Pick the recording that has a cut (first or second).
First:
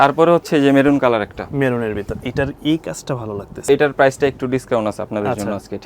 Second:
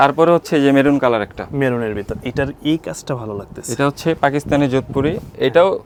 first